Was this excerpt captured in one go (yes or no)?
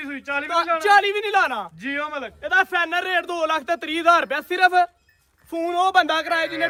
yes